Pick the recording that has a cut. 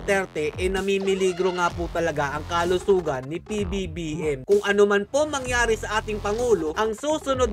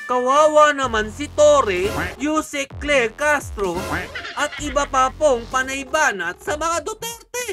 first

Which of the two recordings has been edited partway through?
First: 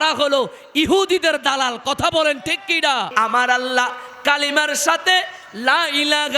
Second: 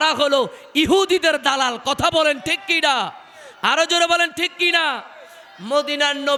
first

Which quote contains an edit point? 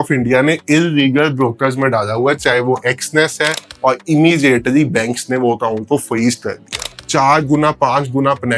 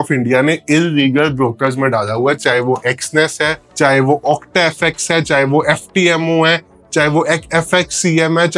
first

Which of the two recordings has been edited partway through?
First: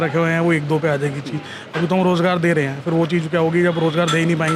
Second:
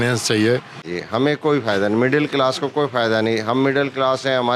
second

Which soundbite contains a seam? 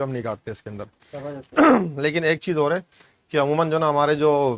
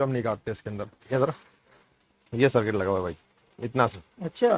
second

